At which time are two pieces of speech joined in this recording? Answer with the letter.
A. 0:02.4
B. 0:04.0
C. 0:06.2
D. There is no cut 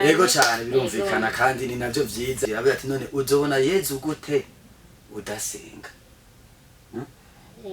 A